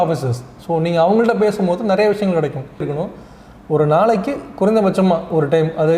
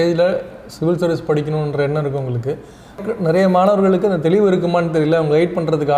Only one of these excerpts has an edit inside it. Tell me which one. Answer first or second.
first